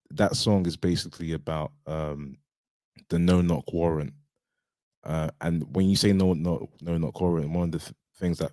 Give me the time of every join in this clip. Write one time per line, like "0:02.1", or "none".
none